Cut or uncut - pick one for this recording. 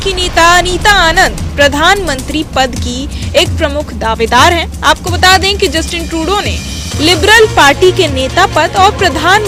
uncut